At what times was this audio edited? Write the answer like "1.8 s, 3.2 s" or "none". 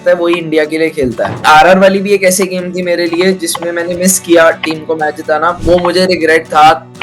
1.4 s, 5.6 s